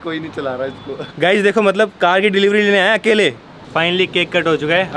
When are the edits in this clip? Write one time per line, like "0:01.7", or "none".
0:01.1
0:03.6